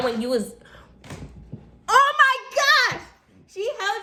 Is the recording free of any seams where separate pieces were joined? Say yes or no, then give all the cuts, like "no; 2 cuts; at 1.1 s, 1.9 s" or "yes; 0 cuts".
yes; 0 cuts